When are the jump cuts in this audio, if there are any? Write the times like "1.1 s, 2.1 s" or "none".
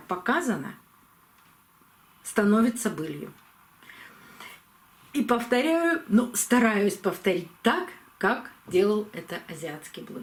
none